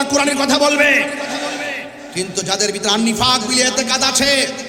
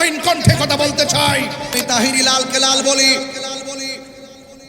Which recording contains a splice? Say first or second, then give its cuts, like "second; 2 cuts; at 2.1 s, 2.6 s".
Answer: second; 1 cut; at 1.8 s